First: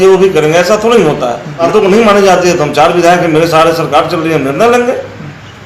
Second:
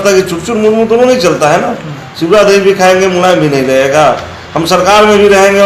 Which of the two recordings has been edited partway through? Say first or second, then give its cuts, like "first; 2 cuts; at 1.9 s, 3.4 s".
first; 1 cut; at 1.6 s